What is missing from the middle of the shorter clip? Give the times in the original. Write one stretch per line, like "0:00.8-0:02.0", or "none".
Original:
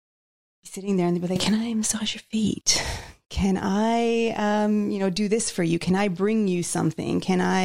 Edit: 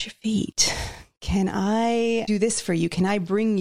0:04.3-0:05.2